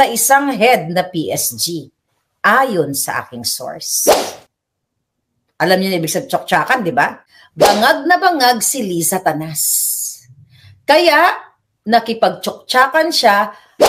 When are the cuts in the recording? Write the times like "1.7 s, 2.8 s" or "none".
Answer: 7.7 s